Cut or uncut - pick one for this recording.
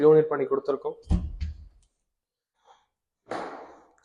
cut